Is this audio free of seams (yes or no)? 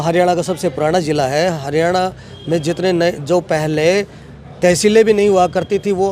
yes